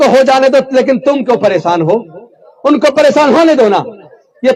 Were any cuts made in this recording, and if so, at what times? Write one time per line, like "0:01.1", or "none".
none